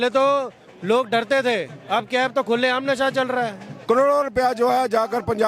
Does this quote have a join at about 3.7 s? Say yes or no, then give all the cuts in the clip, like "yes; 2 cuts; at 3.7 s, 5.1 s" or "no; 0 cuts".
yes; 1 cut; at 3.7 s